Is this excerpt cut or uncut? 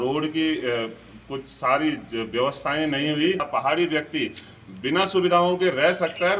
uncut